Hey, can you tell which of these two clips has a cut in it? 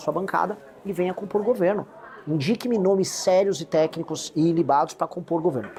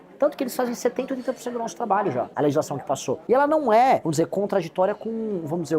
second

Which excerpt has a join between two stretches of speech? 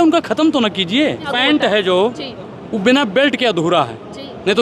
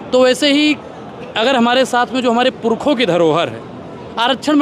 first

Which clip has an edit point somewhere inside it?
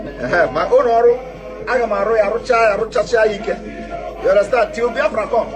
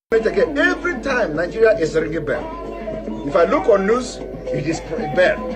second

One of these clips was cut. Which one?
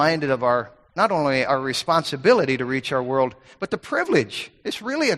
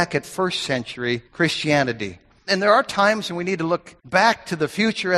second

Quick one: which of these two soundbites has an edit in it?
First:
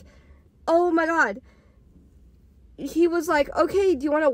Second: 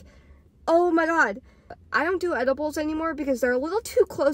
second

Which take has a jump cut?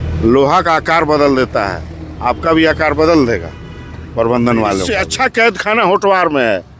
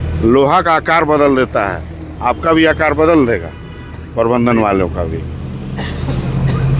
first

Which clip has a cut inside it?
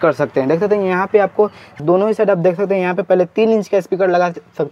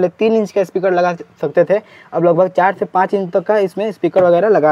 first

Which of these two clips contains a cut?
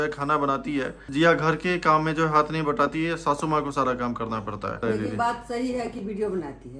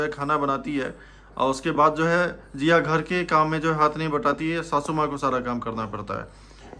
first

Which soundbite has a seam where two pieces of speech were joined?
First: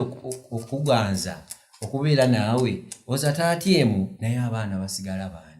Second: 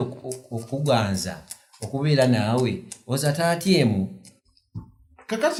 first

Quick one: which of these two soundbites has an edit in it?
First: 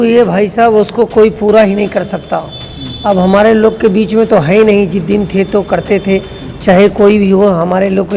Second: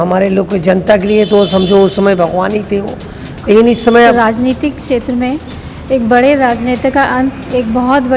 second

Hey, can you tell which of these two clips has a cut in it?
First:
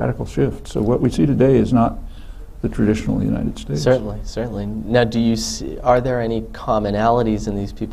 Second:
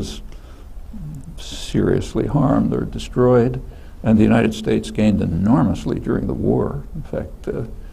second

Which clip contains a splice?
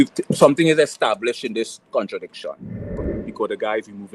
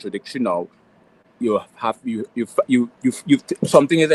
first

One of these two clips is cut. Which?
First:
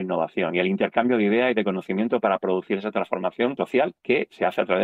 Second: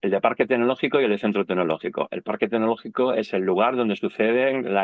first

